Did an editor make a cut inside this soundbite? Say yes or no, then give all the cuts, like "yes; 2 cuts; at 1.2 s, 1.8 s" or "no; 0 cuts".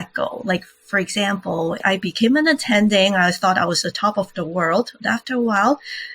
yes; 1 cut; at 1.8 s